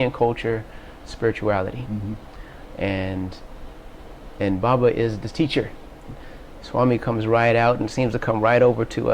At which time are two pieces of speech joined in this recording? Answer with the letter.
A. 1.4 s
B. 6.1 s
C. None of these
B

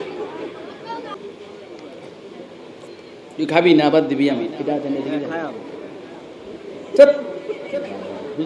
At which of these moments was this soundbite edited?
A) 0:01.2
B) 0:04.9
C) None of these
A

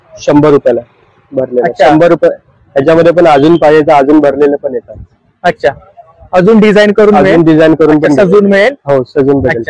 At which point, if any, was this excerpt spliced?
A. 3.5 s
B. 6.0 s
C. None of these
C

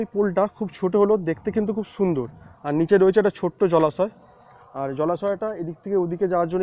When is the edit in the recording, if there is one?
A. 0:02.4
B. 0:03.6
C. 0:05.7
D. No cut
D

